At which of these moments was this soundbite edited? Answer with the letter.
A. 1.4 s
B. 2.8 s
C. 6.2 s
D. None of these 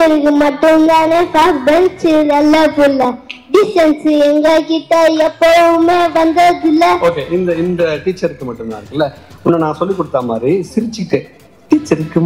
D